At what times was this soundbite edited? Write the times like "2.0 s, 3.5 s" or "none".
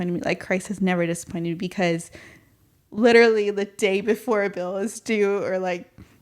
none